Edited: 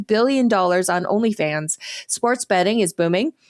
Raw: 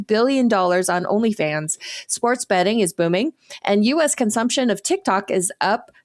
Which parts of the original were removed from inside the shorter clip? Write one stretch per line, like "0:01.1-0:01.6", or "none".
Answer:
none